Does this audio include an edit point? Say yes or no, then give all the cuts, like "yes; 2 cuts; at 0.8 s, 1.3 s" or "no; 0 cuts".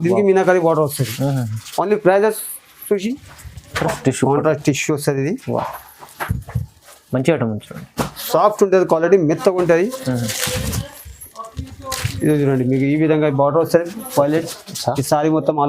yes; 1 cut; at 3.8 s